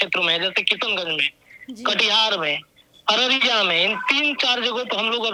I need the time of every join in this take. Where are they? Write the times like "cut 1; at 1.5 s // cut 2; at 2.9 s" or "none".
none